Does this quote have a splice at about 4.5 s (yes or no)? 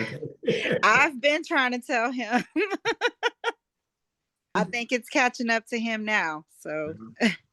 yes